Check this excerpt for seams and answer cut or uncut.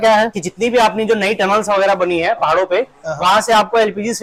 uncut